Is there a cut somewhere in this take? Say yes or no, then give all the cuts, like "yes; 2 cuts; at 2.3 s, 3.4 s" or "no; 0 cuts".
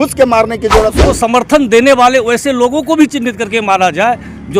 yes; 1 cut; at 1.0 s